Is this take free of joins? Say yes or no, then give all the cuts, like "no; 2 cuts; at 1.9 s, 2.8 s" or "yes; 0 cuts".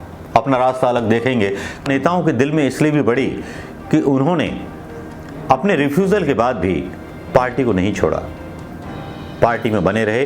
no; 1 cut; at 1.8 s